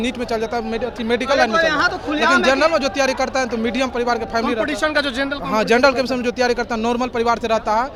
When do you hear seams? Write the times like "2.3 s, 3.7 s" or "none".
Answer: none